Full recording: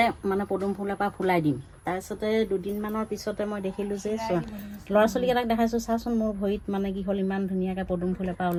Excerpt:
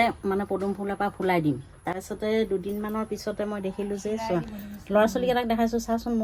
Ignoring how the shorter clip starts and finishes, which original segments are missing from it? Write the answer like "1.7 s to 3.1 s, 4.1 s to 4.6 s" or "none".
none